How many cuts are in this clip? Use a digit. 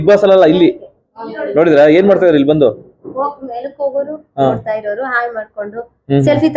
0